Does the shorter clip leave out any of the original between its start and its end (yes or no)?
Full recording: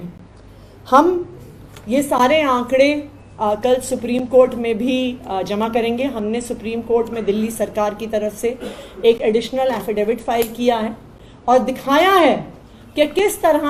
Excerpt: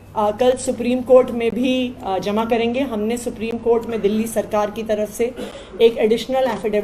no